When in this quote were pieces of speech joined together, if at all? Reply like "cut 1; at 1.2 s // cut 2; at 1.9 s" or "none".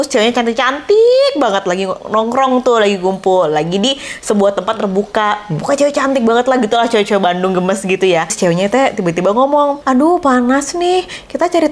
cut 1; at 8.3 s // cut 2; at 9.8 s